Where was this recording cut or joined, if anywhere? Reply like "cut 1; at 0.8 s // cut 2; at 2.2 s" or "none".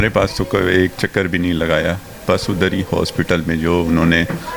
none